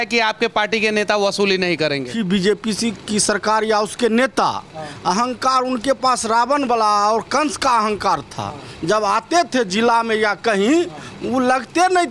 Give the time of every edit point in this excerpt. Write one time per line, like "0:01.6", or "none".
0:02.1

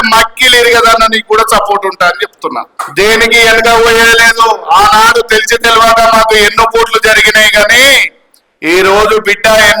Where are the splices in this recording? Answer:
0:02.8

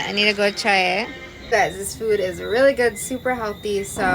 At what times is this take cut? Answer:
0:01.5

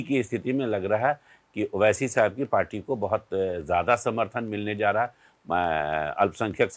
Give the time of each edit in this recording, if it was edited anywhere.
none

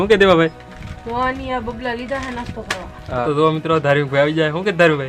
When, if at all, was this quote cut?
0:03.2

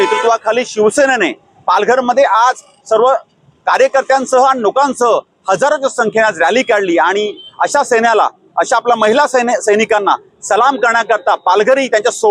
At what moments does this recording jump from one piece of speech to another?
none

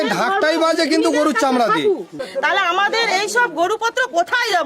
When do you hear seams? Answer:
0:02.2

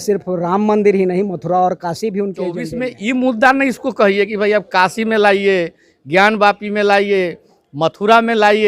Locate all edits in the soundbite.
0:02.6

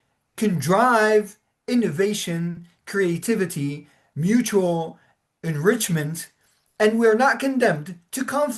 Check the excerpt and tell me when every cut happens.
none

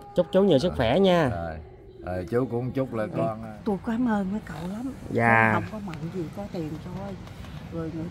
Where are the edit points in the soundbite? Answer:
0:03.3

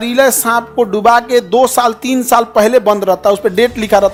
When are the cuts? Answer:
none

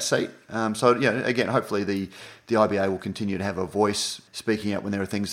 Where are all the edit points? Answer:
none

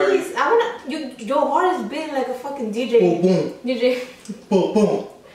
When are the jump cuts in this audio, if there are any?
none

